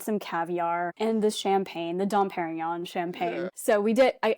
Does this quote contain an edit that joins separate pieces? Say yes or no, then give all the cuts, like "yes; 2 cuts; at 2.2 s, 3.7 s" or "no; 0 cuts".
yes; 2 cuts; at 0.9 s, 3.5 s